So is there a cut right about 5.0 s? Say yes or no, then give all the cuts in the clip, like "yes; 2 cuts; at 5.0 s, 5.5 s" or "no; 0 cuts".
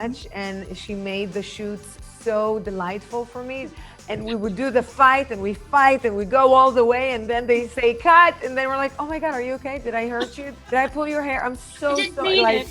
no; 2 cuts; at 3.7 s, 10.4 s